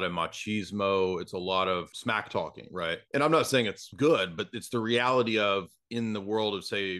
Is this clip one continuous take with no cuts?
no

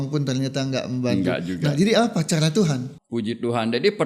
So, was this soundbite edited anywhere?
yes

